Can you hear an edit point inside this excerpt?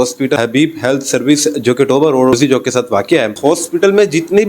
yes; 1 cut; at 3.3 s

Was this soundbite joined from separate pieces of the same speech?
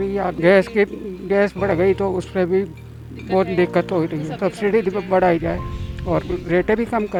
no; 0 cuts

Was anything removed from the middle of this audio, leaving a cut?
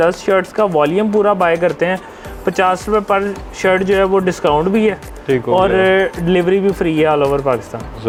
no; 0 cuts

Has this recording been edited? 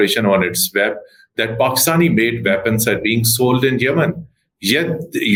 no; 0 cuts

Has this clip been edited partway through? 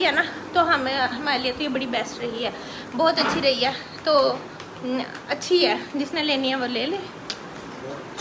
no; 0 cuts

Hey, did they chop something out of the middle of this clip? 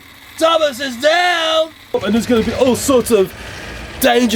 yes; 1 cut; at 2.0 s

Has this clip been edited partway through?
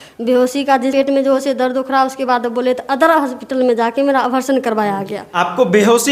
yes; 1 cut; at 0.9 s

